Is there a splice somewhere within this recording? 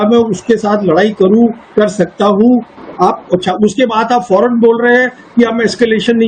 yes; 1 cut; at 2.8 s

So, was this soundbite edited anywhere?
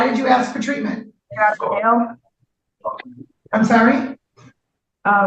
yes; 1 cut; at 1.2 s

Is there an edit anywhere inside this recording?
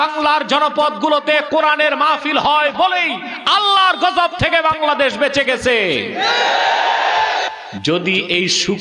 no; 0 cuts

